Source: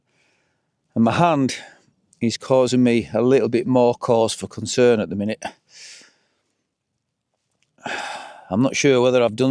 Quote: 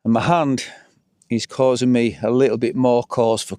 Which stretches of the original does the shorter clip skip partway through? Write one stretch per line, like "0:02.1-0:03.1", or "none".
none

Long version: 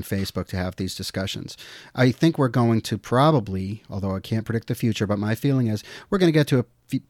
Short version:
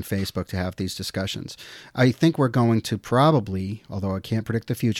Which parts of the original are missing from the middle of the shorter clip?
none

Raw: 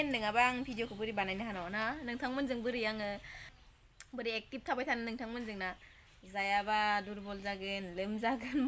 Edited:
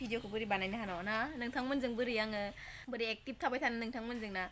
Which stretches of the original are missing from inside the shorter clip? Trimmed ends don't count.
0:03.4-0:03.9

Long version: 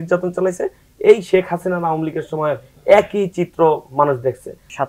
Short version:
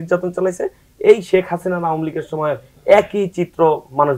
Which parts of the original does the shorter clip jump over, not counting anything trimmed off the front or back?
none

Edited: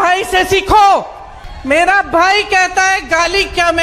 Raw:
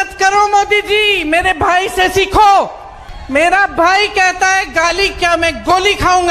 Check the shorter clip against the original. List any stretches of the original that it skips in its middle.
none

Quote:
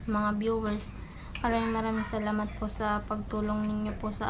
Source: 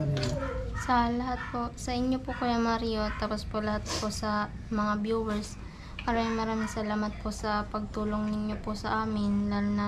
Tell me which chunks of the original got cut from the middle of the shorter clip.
none

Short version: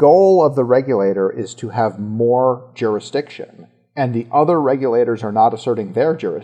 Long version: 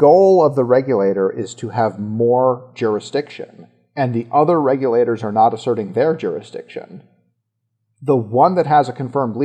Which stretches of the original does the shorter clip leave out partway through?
none

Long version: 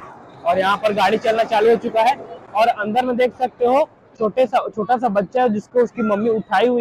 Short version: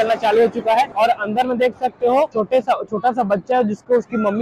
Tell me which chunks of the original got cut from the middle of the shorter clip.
0:02.2-0:02.5
0:03.9-0:04.2

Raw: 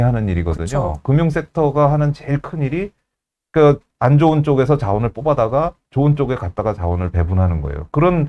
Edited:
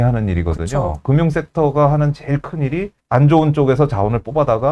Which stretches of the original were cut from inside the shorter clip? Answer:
0:03.0-0:03.9

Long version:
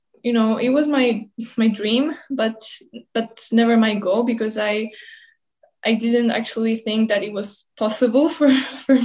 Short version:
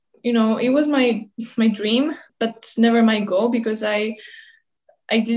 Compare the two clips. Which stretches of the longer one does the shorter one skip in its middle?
0:02.2-0:03.0

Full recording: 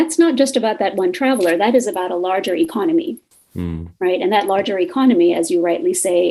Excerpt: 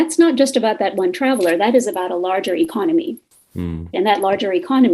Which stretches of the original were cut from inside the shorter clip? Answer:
0:03.9-0:04.2

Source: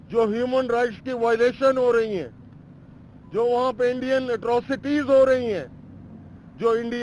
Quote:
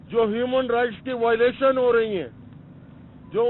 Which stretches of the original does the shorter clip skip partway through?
none

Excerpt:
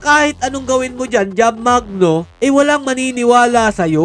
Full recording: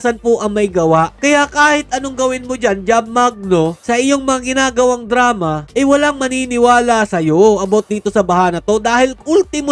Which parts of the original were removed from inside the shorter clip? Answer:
0:03.8-0:05.6

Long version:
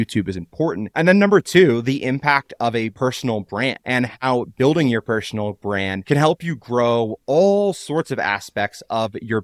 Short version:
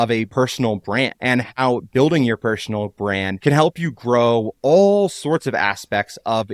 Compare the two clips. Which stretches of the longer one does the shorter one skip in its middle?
none

